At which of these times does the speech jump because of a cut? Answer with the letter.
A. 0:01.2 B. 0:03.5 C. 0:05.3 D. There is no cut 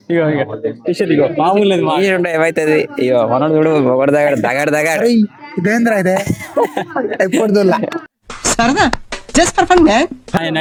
D